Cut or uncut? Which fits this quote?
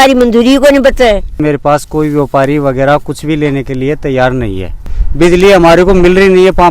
cut